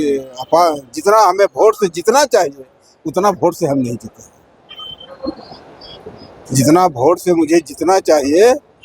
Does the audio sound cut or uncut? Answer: uncut